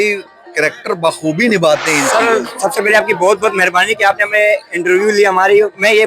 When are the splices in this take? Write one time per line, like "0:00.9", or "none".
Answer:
0:02.0